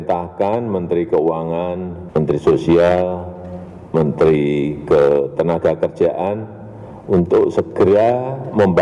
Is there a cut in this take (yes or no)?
yes